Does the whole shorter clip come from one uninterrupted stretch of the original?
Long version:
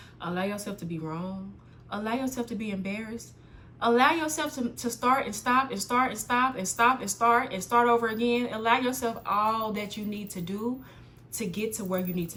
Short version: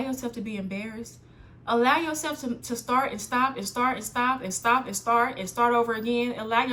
yes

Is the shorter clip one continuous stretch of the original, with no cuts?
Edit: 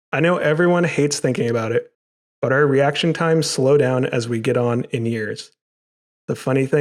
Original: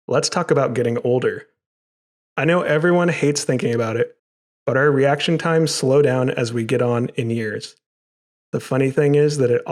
yes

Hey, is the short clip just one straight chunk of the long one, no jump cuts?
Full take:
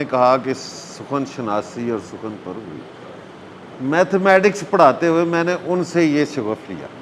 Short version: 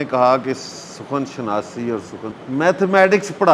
no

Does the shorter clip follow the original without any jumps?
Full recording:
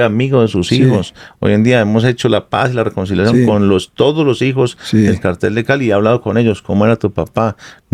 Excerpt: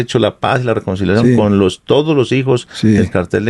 yes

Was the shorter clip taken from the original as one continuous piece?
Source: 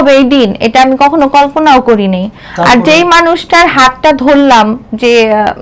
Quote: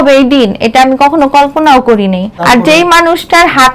no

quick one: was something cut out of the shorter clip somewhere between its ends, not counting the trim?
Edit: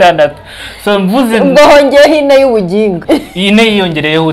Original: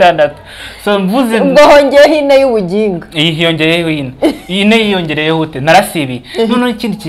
yes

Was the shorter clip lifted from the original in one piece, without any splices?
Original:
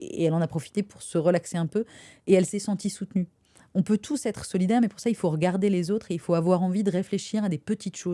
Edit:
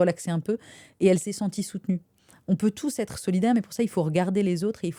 yes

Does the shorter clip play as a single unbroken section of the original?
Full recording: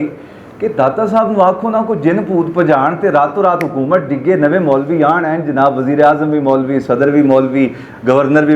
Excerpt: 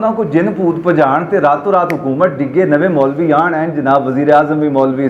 yes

